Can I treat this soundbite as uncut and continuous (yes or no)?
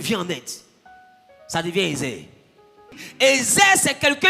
no